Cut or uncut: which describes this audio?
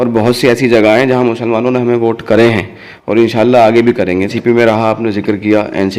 cut